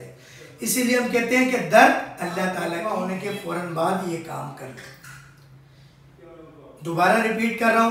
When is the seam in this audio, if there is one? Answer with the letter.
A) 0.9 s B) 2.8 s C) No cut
B